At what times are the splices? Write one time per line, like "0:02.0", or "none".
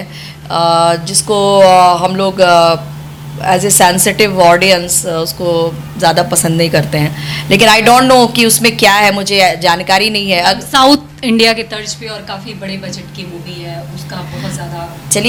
none